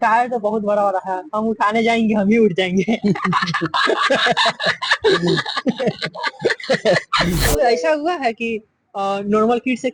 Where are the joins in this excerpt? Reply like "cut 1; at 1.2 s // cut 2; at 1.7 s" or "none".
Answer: cut 1; at 7.5 s